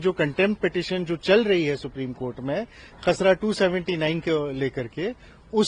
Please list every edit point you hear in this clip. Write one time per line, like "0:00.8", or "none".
none